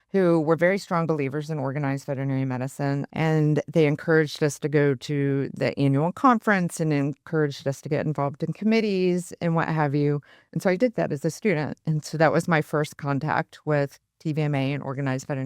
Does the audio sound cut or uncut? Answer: cut